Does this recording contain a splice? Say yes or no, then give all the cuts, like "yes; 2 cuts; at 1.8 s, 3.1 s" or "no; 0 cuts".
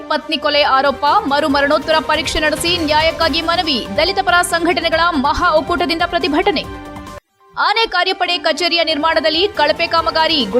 no; 0 cuts